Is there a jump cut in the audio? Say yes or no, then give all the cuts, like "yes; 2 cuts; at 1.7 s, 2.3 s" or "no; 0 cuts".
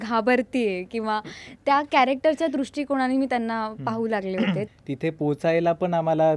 yes; 1 cut; at 4.7 s